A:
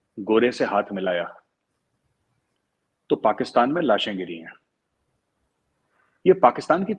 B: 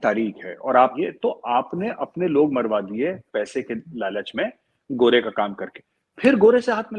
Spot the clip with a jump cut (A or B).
B